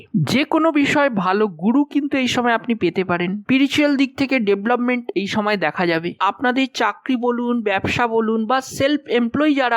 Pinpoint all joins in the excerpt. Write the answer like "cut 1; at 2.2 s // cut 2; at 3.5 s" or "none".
cut 1; at 6.2 s